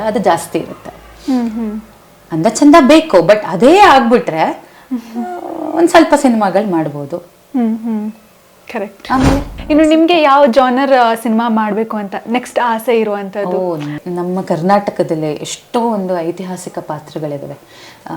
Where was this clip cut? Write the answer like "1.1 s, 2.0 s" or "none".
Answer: 9.5 s, 13.9 s